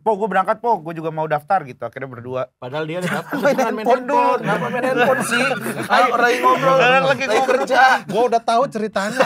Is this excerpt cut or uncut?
uncut